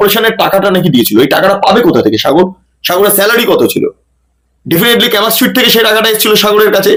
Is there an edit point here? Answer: no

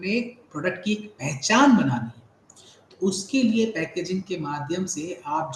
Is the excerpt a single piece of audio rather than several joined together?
yes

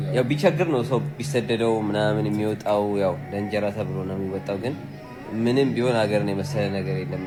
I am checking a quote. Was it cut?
no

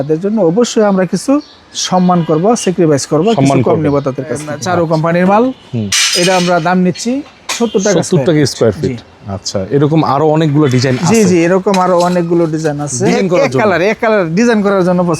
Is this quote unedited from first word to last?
no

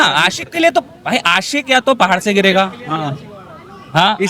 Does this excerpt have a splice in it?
no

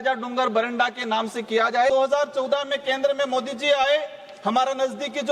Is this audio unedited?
no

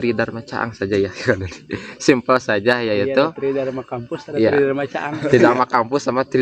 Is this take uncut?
yes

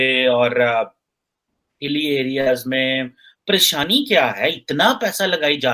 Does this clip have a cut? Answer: yes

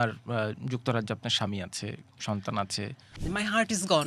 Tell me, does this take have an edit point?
yes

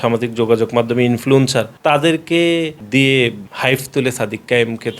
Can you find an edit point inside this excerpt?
yes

